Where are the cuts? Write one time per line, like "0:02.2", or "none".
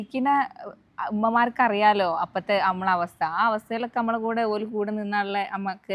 none